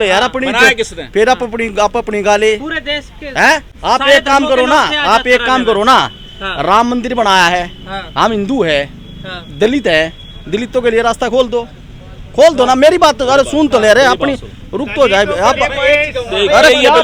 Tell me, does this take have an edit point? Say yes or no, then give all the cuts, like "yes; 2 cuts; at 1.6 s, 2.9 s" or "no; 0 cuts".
no; 0 cuts